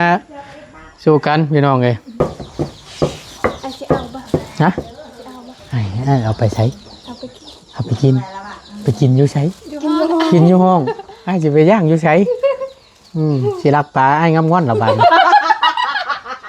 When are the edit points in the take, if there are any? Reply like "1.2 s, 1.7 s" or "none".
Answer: 2.2 s